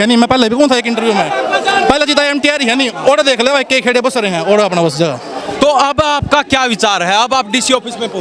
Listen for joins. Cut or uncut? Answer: uncut